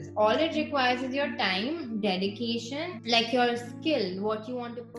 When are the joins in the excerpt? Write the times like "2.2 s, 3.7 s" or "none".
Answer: 3.0 s